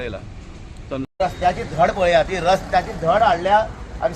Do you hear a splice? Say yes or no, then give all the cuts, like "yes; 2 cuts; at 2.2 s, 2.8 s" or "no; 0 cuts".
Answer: yes; 1 cut; at 1.2 s